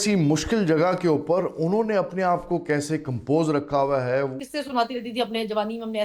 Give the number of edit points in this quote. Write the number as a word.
one